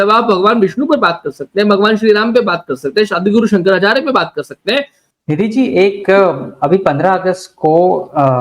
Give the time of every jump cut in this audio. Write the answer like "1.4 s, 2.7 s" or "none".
5.0 s